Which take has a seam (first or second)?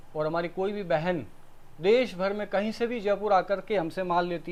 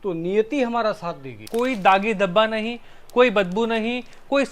second